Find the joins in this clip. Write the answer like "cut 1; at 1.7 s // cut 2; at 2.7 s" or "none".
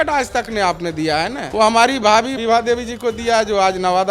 cut 1; at 1.4 s // cut 2; at 2.4 s